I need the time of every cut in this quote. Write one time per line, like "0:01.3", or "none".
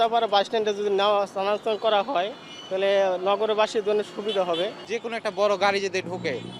none